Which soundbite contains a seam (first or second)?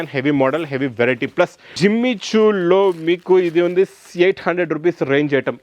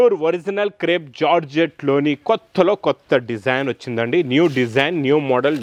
first